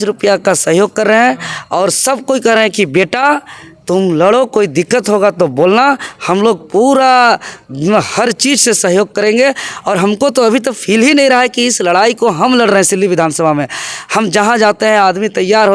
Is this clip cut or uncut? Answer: uncut